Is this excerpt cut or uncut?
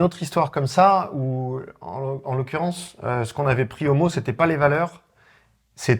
uncut